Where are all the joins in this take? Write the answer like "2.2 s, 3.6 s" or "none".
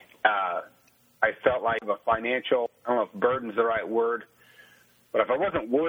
1.8 s, 2.7 s